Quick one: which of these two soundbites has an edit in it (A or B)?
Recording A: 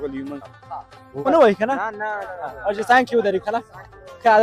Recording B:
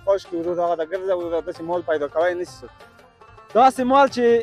A